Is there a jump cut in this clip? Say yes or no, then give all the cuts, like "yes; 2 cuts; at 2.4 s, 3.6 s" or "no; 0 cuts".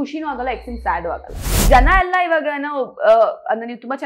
yes; 1 cut; at 1.6 s